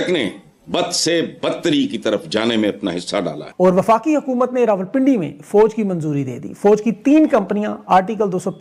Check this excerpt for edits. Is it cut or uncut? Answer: uncut